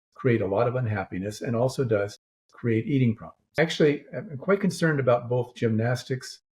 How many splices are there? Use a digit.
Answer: 1